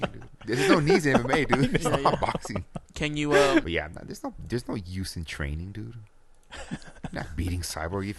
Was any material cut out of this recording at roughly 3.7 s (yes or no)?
yes